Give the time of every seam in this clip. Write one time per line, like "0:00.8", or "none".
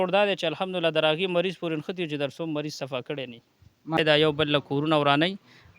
0:04.0